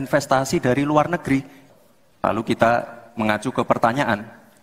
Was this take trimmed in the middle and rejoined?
yes; 1 cut; at 1.6 s

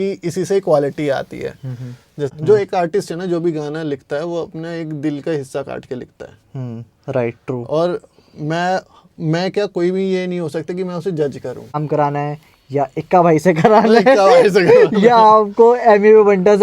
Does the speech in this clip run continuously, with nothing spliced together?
no; 2 cuts; at 2.3 s, 11.7 s

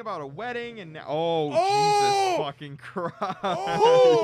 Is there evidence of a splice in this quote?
no; 0 cuts

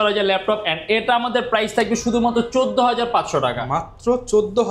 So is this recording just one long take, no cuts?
yes; 0 cuts

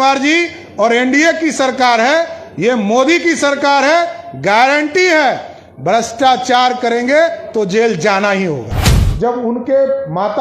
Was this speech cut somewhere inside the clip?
yes; 1 cut; at 8.8 s

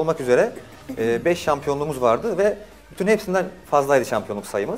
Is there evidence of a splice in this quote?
no; 0 cuts

